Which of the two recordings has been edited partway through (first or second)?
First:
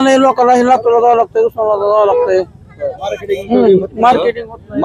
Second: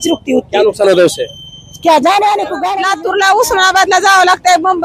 second